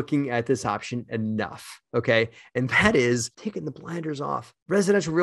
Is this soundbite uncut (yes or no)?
yes